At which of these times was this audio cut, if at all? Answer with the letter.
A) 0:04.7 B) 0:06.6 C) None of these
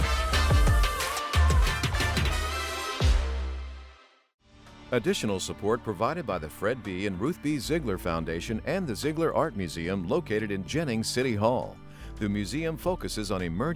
A